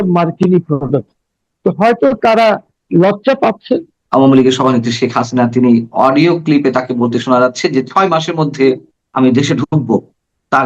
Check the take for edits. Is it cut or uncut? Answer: cut